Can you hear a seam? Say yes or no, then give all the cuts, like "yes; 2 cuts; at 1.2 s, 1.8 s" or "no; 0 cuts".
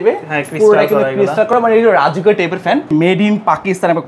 yes; 1 cut; at 2.9 s